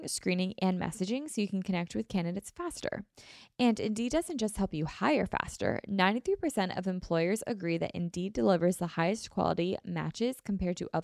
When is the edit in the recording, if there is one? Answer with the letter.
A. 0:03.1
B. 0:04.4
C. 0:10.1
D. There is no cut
D